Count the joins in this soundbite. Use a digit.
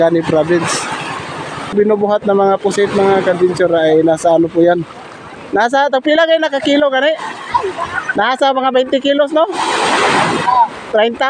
1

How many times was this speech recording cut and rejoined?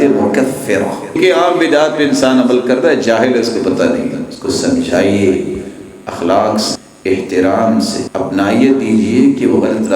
3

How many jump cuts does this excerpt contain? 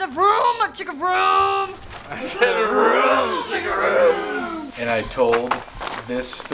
1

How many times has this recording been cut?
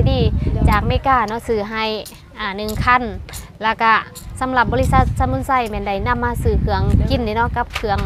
0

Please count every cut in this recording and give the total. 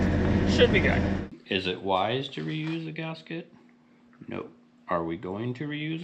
1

